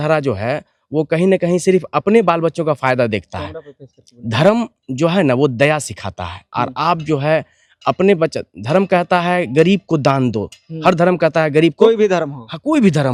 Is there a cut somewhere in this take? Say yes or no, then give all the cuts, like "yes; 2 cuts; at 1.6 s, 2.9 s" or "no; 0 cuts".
no; 0 cuts